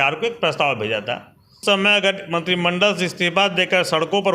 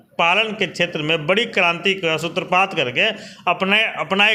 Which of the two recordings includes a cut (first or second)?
first